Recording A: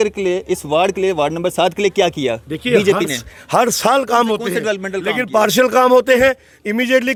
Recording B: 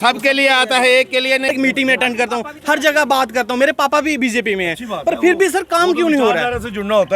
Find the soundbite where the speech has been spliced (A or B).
B